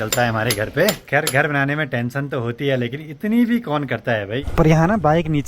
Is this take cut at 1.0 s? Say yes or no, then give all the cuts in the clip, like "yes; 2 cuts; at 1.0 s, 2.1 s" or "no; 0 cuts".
yes; 2 cuts; at 1.0 s, 4.4 s